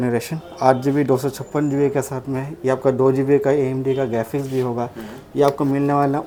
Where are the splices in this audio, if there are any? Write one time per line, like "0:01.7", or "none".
none